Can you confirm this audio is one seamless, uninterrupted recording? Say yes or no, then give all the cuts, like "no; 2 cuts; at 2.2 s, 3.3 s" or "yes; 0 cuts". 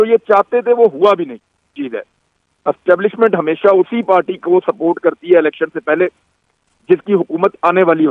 no; 1 cut; at 1.8 s